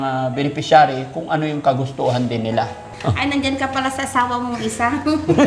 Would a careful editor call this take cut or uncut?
cut